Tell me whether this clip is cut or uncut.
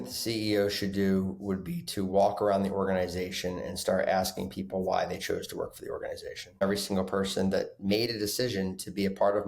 cut